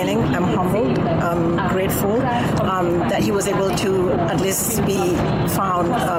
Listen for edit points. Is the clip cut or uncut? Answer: uncut